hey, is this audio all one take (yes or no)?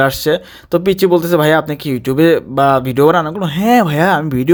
yes